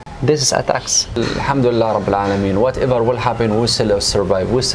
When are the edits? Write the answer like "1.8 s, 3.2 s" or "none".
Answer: 1.2 s